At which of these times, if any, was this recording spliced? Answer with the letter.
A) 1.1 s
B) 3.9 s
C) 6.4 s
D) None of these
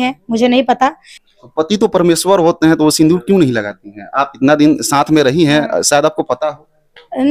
A